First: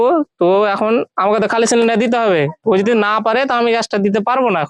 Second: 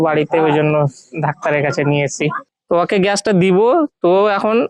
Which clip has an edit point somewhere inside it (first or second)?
second